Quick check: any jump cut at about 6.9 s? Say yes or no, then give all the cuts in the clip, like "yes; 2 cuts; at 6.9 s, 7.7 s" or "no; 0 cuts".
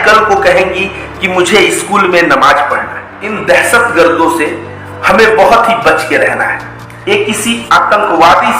yes; 2 cuts; at 3.3 s, 6.9 s